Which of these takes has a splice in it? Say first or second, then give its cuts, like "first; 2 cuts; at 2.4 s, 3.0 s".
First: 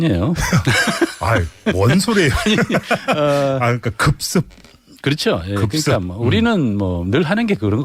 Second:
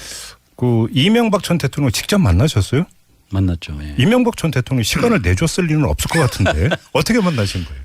second; 1 cut; at 5.9 s